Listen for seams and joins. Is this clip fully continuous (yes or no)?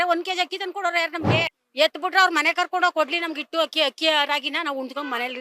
no